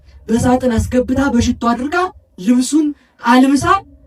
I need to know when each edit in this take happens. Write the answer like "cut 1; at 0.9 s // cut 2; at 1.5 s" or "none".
none